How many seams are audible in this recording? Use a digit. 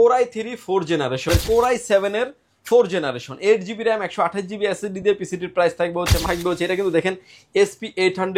2